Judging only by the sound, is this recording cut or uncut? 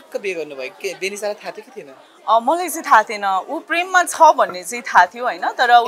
uncut